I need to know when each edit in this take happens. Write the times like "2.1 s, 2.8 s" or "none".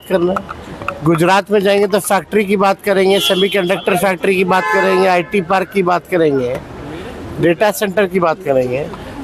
none